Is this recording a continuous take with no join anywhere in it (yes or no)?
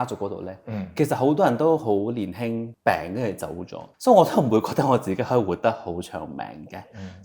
yes